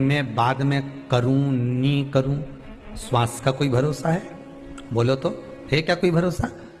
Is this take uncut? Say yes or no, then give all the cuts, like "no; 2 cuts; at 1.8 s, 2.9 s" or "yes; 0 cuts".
yes; 0 cuts